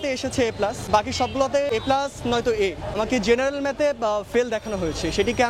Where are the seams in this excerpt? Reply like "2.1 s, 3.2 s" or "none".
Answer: 0.9 s, 1.7 s, 2.9 s